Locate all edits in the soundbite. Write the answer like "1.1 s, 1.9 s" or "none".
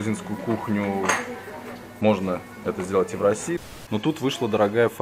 3.6 s